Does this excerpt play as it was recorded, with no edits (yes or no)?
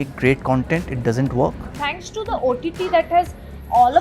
no